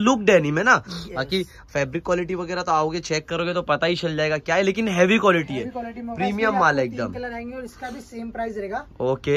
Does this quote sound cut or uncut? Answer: uncut